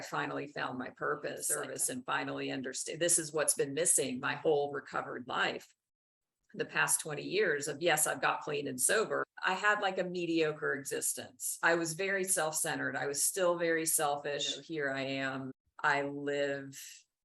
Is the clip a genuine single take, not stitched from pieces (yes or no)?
no